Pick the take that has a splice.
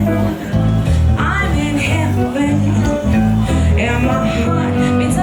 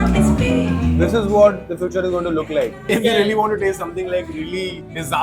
second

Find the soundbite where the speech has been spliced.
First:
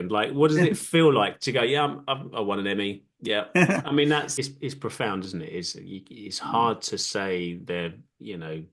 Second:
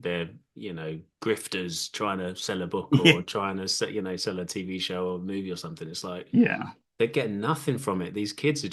first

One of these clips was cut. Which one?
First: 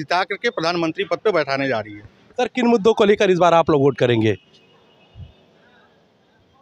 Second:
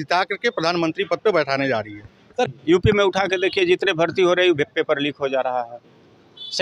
second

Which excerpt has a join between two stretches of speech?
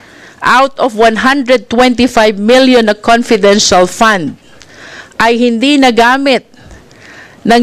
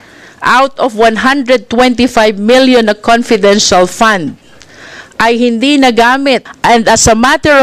second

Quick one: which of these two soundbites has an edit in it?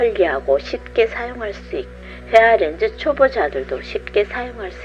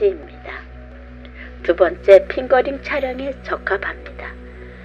first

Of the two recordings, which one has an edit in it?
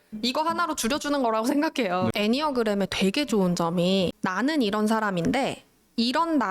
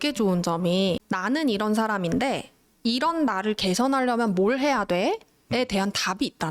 first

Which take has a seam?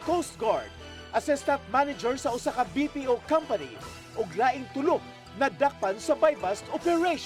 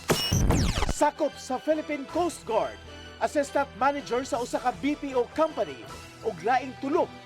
second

